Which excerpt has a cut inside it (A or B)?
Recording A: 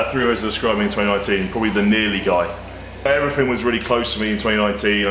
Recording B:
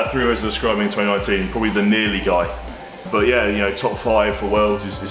B